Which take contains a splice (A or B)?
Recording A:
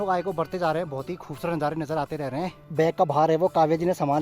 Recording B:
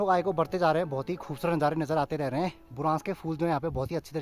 A